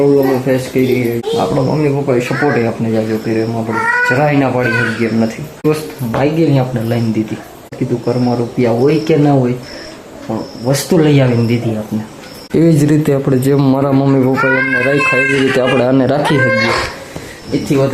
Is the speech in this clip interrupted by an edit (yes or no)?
yes